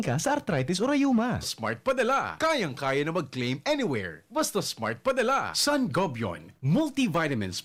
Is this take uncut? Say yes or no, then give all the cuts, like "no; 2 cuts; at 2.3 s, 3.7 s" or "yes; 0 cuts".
yes; 0 cuts